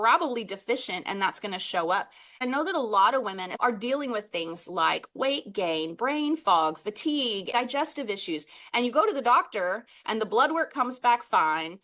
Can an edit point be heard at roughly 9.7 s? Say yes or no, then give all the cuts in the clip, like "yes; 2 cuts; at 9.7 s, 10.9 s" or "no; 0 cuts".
no; 3 cuts; at 2.4 s, 3.4 s, 7.5 s